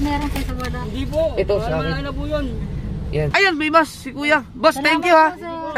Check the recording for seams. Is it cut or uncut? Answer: cut